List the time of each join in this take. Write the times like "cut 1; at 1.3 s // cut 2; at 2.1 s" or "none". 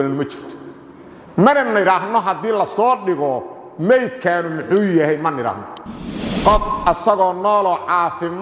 cut 1; at 6.1 s